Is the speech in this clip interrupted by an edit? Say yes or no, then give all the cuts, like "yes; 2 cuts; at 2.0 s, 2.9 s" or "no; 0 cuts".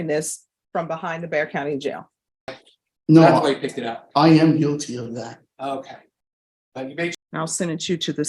yes; 2 cuts; at 2.6 s, 7.1 s